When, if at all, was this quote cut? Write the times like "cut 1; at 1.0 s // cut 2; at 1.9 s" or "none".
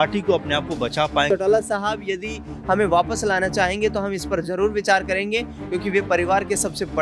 cut 1; at 1.3 s